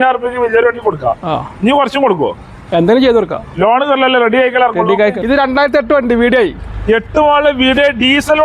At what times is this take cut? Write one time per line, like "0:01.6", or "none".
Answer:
0:05.2

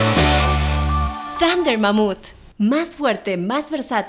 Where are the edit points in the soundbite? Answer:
0:01.2

